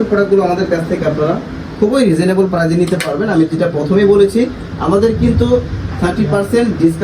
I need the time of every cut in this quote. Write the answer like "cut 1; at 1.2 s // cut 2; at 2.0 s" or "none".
none